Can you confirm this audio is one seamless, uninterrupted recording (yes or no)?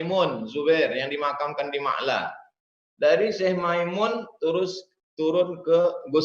yes